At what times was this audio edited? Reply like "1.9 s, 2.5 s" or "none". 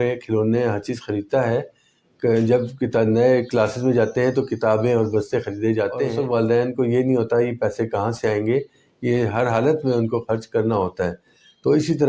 6.1 s